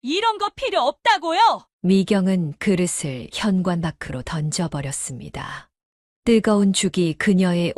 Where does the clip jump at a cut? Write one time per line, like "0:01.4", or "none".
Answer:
none